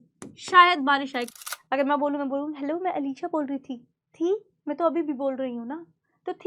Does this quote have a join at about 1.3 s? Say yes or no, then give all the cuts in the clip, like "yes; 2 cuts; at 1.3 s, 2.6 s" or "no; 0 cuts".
yes; 1 cut; at 1.3 s